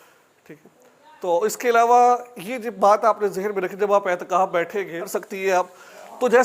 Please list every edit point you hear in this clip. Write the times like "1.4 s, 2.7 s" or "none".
5.2 s